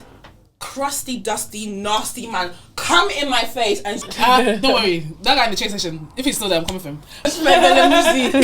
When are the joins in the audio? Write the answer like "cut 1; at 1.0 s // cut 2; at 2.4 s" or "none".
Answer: cut 1; at 4.1 s // cut 2; at 7.3 s